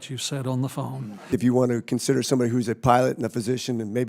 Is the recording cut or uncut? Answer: cut